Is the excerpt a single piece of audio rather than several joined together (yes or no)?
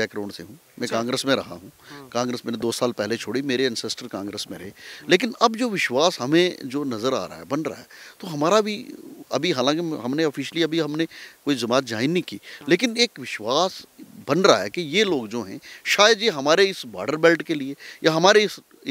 yes